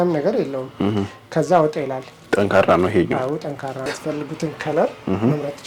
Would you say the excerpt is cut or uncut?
cut